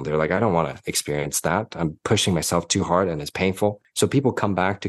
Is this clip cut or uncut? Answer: cut